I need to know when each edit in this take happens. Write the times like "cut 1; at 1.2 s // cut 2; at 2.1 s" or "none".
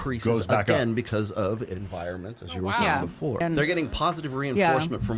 cut 1; at 3.4 s